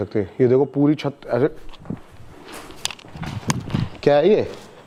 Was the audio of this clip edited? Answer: no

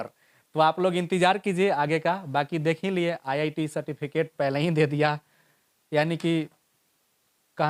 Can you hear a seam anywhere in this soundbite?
no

